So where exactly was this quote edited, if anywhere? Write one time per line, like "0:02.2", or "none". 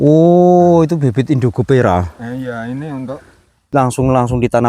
0:03.7